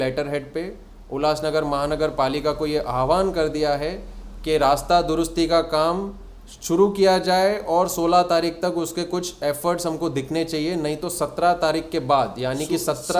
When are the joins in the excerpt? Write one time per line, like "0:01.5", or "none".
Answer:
none